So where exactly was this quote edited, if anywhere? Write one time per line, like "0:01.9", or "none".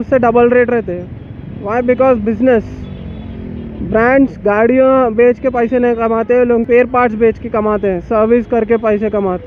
none